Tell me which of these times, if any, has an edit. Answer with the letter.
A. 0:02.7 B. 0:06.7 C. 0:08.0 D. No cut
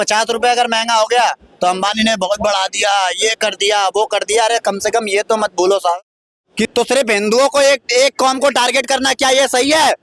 B